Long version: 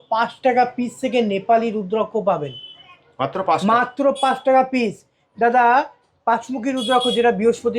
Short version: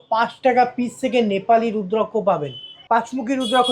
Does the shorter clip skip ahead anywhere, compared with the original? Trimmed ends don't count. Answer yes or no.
yes